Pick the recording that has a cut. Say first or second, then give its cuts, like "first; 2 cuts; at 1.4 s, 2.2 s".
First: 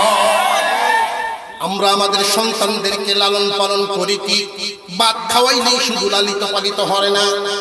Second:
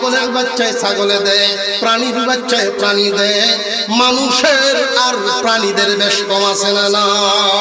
first; 1 cut; at 1.4 s